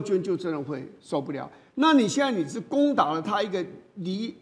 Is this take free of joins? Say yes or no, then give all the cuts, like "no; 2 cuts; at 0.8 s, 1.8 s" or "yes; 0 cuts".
yes; 0 cuts